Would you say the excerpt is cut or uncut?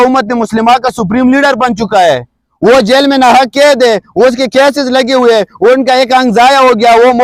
uncut